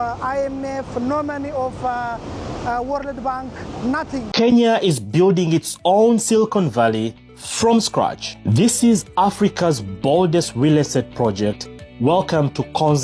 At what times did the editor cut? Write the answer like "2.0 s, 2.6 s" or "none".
4.3 s